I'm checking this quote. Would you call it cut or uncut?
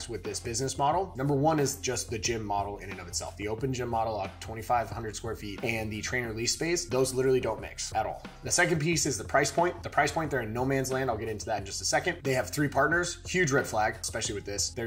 cut